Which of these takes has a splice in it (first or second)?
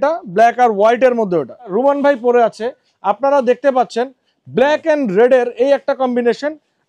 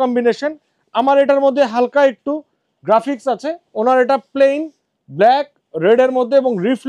first